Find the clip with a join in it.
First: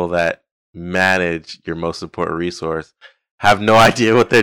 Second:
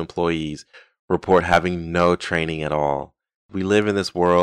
second; 1 cut; at 3.5 s

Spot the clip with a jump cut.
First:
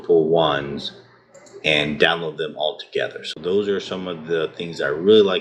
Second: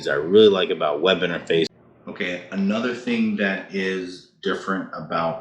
second; 1 cut; at 1.7 s

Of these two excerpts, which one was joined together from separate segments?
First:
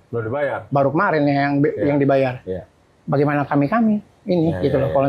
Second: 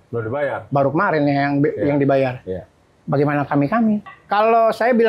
second; 1 cut; at 4.1 s

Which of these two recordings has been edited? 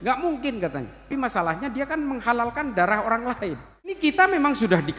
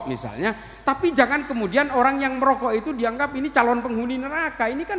first; 2 cuts; at 1.1 s, 4.1 s

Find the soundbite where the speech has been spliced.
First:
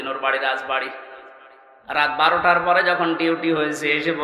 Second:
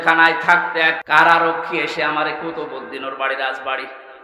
second; 1 cut; at 1.0 s

